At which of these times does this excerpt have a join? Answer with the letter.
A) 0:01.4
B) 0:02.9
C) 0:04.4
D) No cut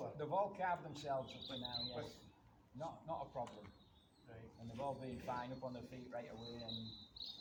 D